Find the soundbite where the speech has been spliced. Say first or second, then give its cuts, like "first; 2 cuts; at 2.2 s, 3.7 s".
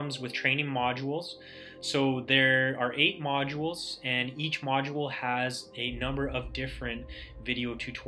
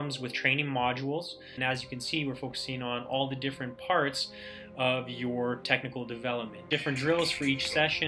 second; 2 cuts; at 1.6 s, 6.7 s